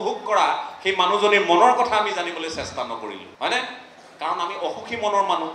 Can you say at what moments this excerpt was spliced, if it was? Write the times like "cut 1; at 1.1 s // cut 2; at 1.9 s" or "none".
cut 1; at 3.2 s